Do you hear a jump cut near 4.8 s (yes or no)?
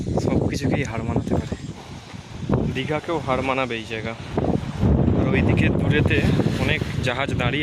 yes